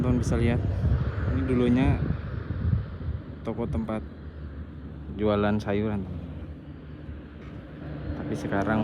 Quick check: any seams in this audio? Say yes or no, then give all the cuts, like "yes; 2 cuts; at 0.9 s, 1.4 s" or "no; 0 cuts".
no; 0 cuts